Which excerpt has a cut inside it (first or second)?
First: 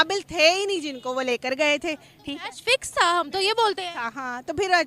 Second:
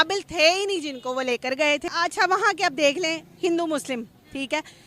second